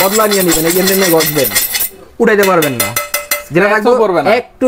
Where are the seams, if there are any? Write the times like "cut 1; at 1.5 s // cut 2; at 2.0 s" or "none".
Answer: none

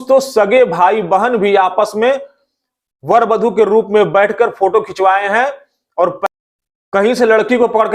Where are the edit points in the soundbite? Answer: cut 1; at 6.2 s

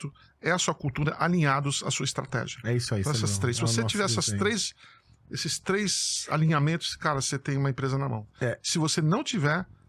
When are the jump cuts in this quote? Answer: none

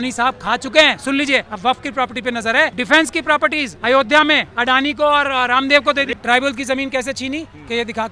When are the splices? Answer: cut 1; at 1.5 s // cut 2; at 2.8 s // cut 3; at 3.7 s // cut 4; at 4.5 s // cut 5; at 6.1 s

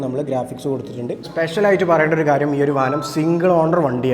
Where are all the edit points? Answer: cut 1; at 1.2 s

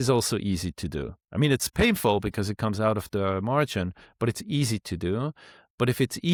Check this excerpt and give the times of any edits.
none

